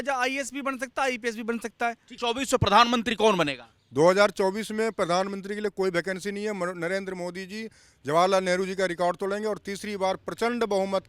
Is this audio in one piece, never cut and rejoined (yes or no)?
no